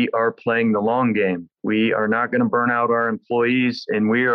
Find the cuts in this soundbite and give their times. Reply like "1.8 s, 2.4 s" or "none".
1.5 s